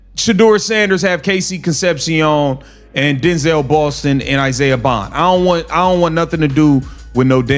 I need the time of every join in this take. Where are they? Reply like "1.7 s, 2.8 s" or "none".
none